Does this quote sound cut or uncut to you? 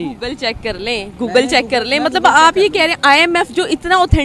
uncut